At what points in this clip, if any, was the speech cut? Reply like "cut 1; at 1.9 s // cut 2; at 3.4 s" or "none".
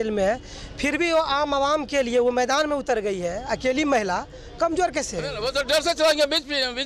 cut 1; at 5.4 s